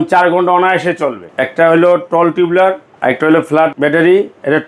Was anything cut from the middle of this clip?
yes; 1 cut; at 1.3 s

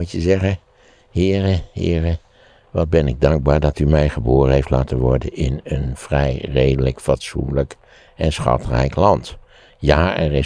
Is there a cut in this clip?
no; 0 cuts

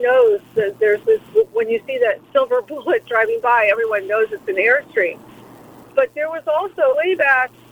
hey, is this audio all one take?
no; 1 cut; at 2.2 s

